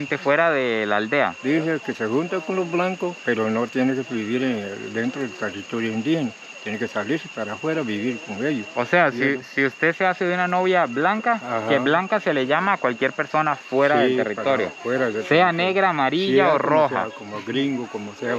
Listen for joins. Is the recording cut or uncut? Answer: uncut